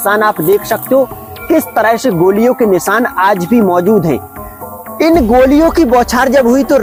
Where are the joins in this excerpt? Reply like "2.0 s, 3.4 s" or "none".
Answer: none